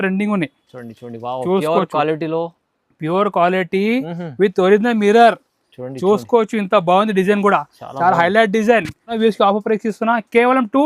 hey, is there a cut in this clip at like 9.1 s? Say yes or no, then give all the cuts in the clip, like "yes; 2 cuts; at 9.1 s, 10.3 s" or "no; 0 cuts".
yes; 1 cut; at 9.1 s